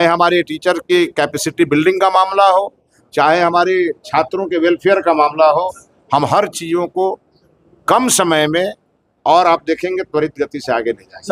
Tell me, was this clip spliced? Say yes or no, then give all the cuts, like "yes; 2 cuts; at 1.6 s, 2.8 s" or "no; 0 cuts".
no; 0 cuts